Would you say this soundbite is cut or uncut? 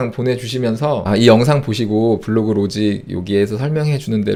uncut